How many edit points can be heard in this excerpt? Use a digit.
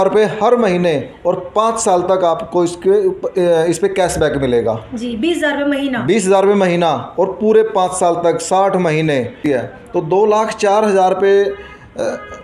1